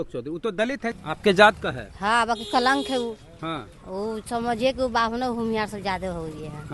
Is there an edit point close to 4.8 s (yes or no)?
no